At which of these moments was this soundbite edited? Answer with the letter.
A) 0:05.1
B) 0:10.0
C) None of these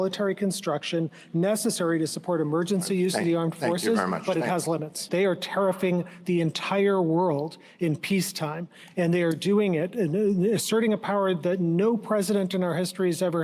A